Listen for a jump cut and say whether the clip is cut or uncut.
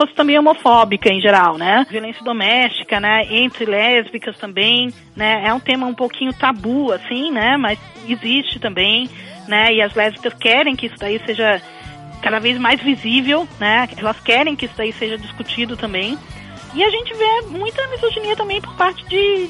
cut